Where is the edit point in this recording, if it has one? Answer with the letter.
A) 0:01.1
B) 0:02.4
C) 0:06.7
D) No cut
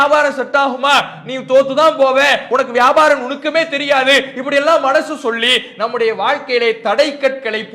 B